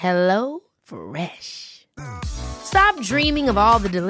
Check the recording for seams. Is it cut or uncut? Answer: uncut